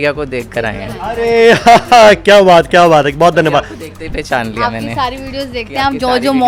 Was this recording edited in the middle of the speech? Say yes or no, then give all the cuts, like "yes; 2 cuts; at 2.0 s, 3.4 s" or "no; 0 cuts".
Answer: no; 0 cuts